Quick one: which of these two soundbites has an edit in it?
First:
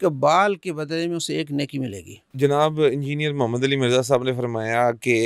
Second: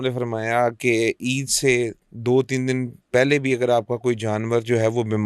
first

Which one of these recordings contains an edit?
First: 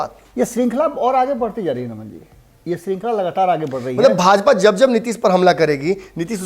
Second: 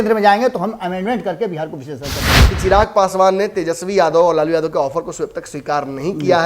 second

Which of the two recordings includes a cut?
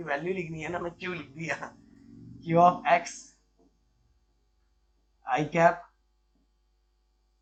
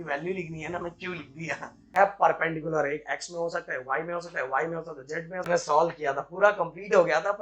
second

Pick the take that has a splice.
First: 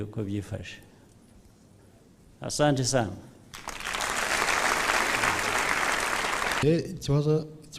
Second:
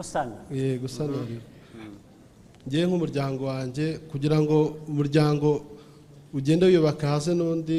first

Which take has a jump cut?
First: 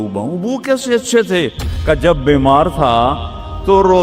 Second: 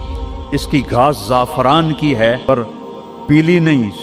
second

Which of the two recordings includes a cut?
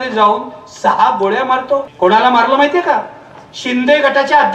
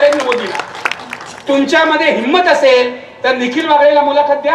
first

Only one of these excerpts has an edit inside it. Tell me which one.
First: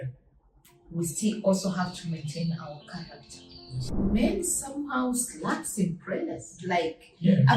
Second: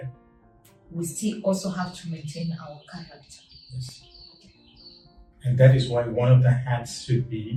first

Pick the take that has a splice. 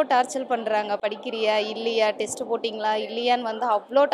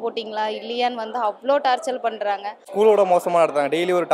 second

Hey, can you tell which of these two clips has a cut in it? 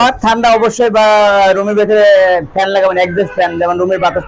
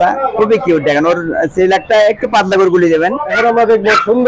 second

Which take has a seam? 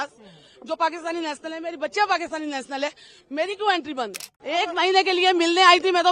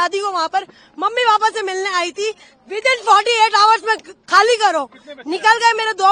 first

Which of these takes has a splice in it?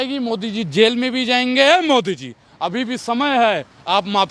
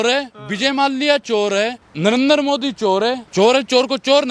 second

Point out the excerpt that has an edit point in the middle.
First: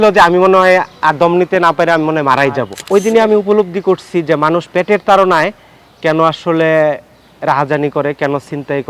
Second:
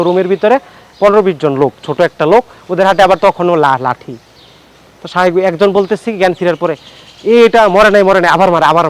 first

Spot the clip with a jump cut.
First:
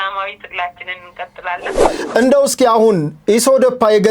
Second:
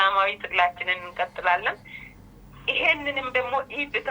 first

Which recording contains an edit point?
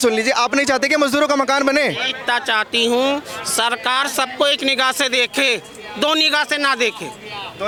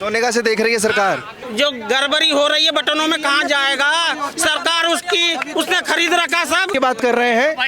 second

